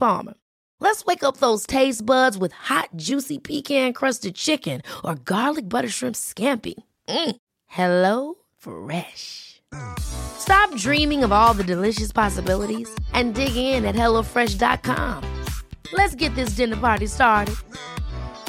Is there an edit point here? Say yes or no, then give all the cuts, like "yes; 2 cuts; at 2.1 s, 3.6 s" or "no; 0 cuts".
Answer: no; 0 cuts